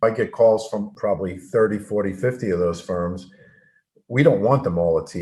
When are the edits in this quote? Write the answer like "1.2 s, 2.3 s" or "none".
0.9 s